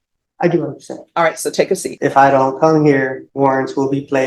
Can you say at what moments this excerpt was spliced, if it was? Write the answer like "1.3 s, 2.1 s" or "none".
1.9 s, 3.2 s